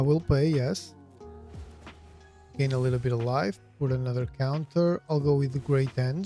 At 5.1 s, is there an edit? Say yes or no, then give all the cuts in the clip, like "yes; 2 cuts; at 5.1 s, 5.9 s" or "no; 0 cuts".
no; 0 cuts